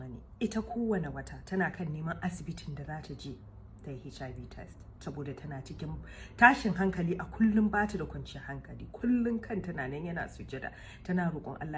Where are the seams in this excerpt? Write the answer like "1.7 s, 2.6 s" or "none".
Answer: none